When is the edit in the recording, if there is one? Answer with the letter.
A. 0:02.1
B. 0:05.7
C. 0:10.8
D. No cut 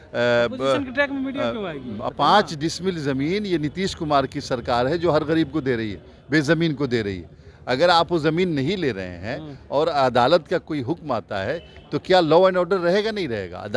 A